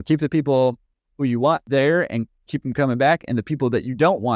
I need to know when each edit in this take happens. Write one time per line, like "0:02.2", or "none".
0:01.6